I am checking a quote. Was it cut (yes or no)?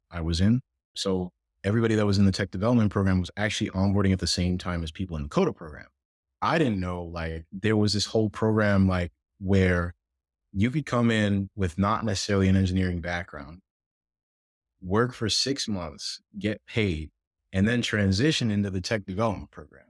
no